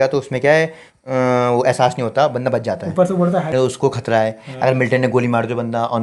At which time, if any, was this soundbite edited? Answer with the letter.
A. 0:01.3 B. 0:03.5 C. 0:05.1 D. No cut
B